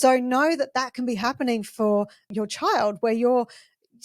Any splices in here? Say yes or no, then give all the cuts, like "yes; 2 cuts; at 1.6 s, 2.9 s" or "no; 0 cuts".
yes; 1 cut; at 2.3 s